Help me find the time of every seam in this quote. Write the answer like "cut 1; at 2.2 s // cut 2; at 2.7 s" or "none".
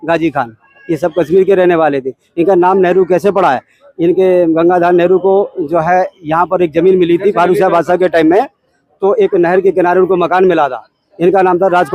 none